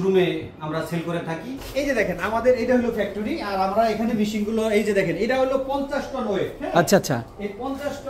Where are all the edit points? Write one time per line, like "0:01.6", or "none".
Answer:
0:01.7